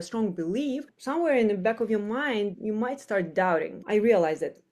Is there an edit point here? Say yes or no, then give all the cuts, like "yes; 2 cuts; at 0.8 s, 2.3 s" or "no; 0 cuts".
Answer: yes; 3 cuts; at 0.9 s, 2.6 s, 3.8 s